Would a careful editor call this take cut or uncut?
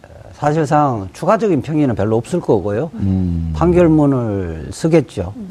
uncut